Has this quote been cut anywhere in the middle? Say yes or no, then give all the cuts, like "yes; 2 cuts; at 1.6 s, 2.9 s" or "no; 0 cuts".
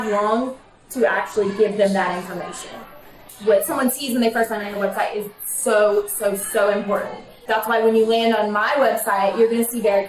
yes; 2 cuts; at 3.2 s, 7.3 s